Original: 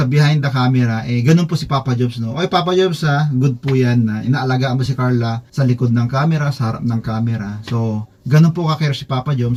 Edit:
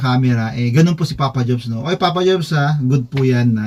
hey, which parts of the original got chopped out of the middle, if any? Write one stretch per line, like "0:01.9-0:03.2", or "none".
none